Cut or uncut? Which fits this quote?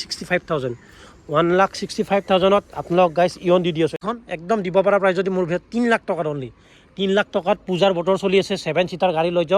cut